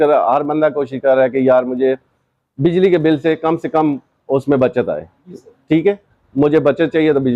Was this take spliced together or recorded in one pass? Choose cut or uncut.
uncut